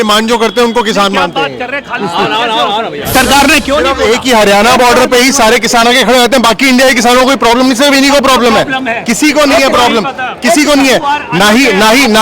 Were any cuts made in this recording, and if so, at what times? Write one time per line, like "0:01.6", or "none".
0:03.1